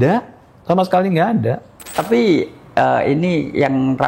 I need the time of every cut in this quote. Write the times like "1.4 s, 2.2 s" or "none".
2.0 s